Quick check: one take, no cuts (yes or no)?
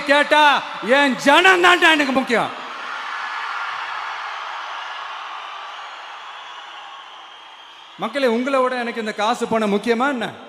yes